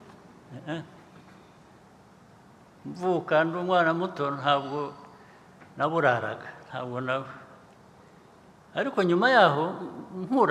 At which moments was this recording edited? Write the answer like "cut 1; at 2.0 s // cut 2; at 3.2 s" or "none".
none